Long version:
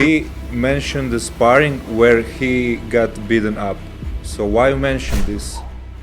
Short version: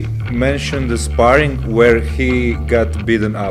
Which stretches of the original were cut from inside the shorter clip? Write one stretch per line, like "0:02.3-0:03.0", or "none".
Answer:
none

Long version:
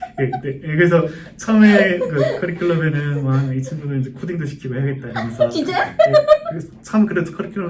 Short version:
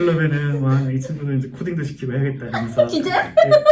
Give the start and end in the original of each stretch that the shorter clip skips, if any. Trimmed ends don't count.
none

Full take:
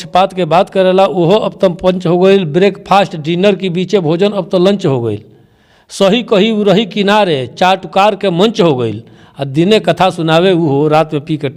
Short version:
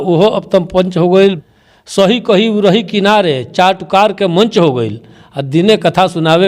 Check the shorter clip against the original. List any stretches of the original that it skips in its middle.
0:02.5-0:05.4

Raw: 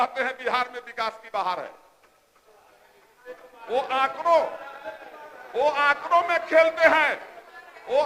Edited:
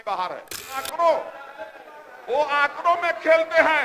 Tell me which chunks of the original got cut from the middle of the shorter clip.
0:02.2-0:04.2

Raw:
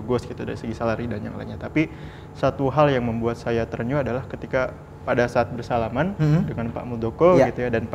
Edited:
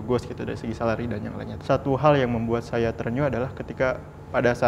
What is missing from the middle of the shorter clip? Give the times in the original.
0:01.5-0:02.2

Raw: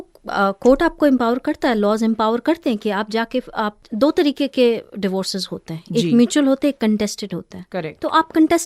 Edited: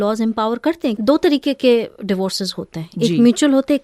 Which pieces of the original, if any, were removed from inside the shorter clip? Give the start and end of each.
0:02.8-0:03.9

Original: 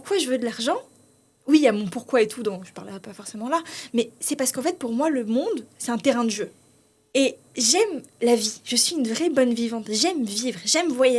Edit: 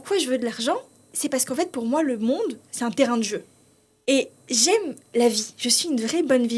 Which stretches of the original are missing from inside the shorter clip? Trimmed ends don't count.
0:01.1-0:04.2

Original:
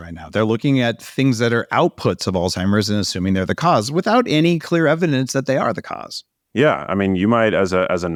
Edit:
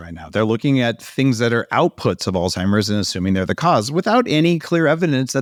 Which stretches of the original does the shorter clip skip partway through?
none

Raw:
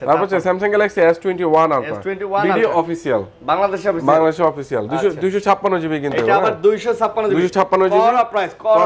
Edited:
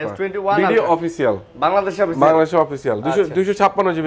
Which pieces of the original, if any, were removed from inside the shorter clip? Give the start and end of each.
none

